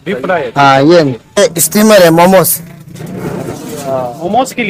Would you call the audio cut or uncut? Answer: cut